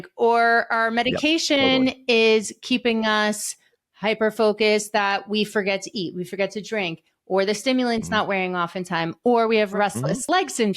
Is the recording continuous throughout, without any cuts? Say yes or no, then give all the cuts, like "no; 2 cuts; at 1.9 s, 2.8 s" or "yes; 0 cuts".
no; 1 cut; at 9.8 s